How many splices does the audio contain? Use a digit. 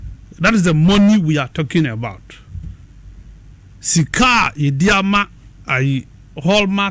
1